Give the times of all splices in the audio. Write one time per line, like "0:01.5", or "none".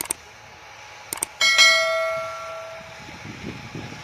0:02.9